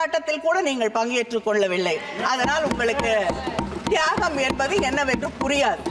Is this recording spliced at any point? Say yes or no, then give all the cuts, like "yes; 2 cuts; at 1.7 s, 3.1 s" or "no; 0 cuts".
no; 0 cuts